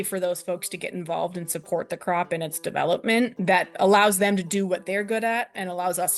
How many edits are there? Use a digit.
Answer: 1